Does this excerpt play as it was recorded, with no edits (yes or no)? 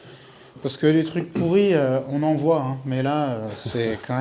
yes